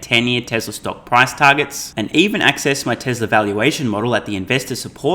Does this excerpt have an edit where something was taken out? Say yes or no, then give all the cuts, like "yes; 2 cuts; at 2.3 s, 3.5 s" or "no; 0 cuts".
no; 0 cuts